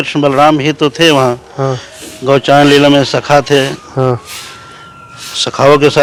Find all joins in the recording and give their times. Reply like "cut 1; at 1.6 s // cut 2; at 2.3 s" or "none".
none